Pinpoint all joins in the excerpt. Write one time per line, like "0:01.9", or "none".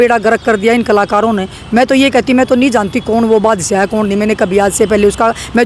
none